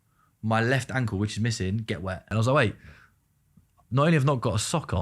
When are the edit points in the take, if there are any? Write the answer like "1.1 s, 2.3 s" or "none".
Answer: 2.3 s